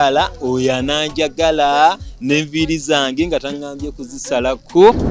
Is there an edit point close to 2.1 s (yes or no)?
no